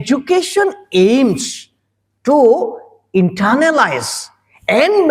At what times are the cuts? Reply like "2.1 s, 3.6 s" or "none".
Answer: none